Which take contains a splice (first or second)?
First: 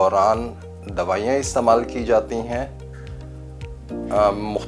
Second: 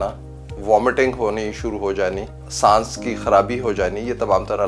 second